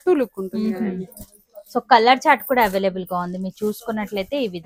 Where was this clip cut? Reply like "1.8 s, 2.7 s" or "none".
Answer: none